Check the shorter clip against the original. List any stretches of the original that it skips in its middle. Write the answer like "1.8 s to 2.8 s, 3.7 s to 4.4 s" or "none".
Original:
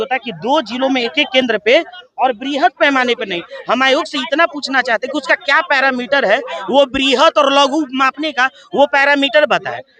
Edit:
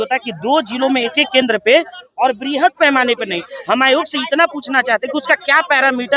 none